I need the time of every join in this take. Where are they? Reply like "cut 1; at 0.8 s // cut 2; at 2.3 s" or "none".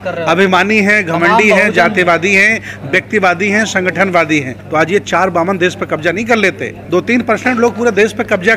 cut 1; at 4.6 s // cut 2; at 6.7 s

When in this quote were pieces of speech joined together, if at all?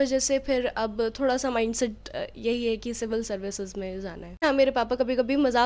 cut 1; at 4.4 s

